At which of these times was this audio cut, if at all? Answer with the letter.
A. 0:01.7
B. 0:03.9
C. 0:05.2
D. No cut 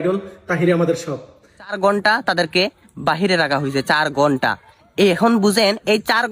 A